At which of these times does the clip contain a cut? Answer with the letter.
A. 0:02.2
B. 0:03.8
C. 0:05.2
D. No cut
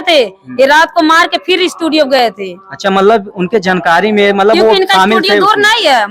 D